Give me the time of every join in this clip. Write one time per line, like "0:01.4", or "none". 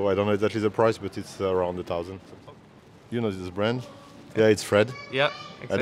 0:02.2
0:04.2